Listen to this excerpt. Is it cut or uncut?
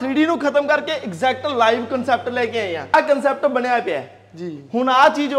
cut